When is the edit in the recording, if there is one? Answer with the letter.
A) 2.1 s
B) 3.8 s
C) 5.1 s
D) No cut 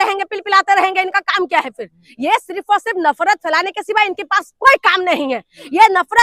D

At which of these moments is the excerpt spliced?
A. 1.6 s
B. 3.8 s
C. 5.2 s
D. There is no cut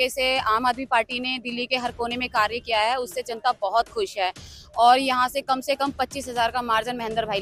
D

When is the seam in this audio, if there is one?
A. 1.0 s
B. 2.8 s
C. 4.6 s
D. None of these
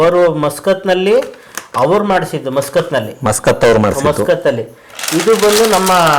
D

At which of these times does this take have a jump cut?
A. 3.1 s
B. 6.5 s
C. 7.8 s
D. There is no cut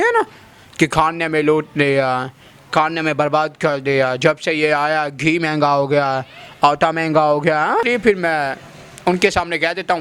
C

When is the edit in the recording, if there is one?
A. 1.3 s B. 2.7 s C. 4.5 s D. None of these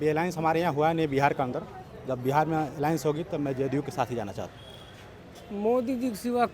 C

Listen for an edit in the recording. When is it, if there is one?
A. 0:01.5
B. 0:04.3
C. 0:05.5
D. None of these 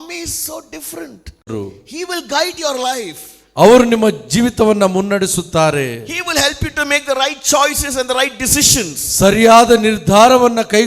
A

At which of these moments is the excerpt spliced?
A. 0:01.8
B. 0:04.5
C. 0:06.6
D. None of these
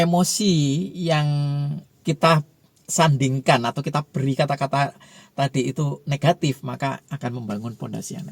A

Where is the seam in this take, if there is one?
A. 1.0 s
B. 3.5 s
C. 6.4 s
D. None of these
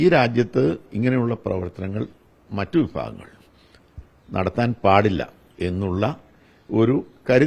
D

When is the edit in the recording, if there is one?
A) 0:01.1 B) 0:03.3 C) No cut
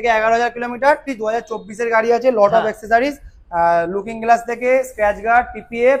A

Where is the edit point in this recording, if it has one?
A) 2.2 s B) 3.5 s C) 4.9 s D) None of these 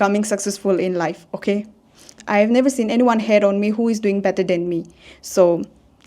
A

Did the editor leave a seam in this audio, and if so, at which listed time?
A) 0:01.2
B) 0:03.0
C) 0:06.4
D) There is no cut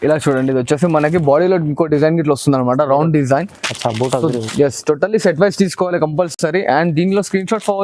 D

